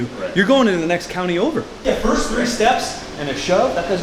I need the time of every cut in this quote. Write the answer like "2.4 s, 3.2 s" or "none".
1.7 s

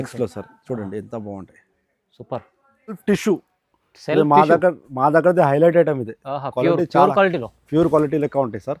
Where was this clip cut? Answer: 3.0 s

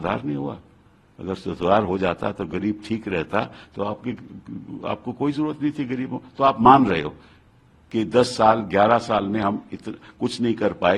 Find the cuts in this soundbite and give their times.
none

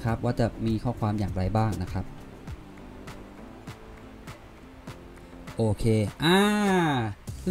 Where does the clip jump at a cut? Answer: none

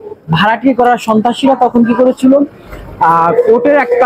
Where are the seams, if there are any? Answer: none

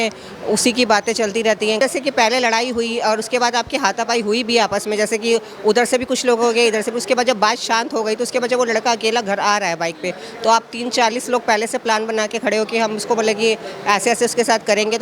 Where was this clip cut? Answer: 1.8 s

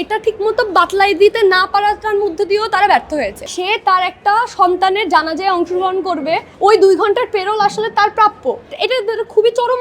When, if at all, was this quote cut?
3.5 s, 6.5 s, 8.8 s

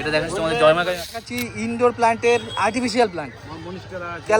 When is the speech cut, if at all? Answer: 1.2 s

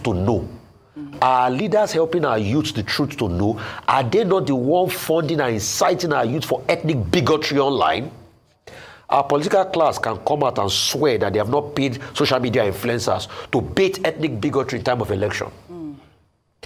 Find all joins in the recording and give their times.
none

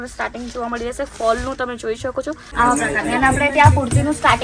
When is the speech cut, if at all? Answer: 2.4 s

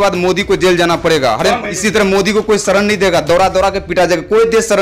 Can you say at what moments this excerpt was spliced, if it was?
1.7 s

